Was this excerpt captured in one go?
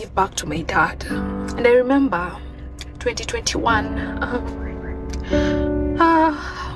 yes; 0 cuts

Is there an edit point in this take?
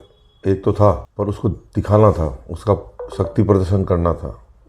yes; 1 cut; at 1.1 s

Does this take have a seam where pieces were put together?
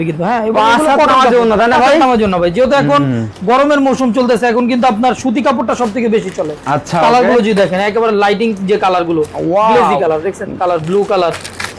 no; 0 cuts

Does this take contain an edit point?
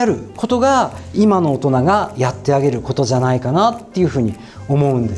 no; 0 cuts

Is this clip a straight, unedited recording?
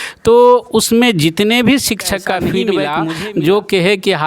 no; 1 cut; at 2.8 s

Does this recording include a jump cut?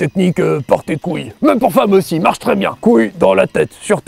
yes; 2 cuts; at 1.3 s, 2.7 s

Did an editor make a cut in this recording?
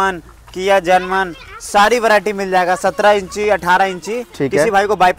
yes; 1 cut; at 4.2 s

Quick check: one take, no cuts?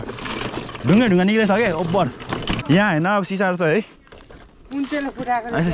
no; 1 cut; at 2.5 s

